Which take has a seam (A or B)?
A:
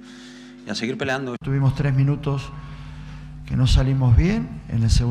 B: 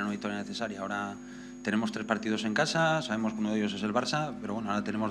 A